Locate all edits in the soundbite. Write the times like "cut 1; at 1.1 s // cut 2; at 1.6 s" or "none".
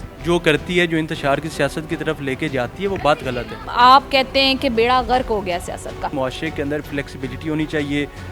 cut 1; at 3.6 s // cut 2; at 6.1 s